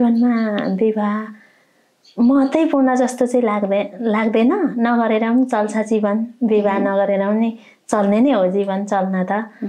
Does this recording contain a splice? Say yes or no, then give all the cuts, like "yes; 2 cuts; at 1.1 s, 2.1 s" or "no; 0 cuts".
no; 0 cuts